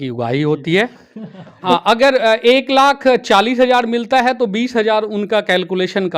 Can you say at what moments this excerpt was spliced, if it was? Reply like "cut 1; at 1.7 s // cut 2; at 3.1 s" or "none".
cut 1; at 1.5 s